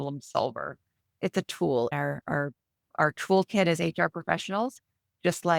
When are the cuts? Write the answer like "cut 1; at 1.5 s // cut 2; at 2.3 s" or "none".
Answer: cut 1; at 1.2 s